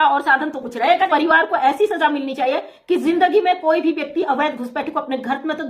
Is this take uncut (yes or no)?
no